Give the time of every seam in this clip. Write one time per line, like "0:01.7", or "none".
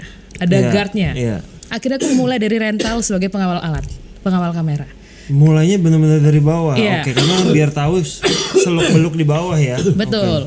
none